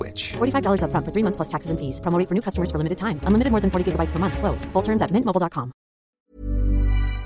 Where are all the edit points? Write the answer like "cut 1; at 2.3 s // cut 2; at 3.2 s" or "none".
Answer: cut 1; at 6.1 s